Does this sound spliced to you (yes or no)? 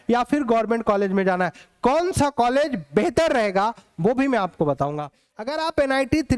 yes